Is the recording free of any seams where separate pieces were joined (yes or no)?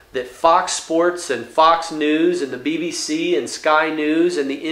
yes